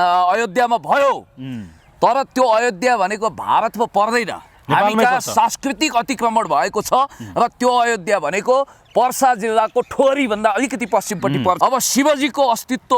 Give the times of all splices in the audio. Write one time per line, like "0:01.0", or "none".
0:11.6